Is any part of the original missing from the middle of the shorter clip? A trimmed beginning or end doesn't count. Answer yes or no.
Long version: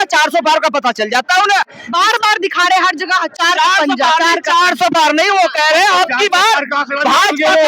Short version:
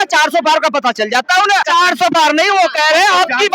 yes